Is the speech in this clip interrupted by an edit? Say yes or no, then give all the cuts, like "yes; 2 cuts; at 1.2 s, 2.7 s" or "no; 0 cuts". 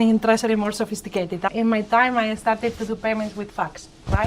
yes; 1 cut; at 1.5 s